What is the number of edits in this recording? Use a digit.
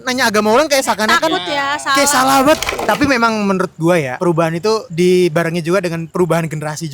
3